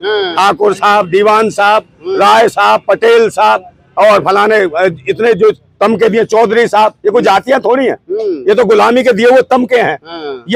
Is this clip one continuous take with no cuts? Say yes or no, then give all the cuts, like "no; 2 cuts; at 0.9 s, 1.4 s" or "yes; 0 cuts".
yes; 0 cuts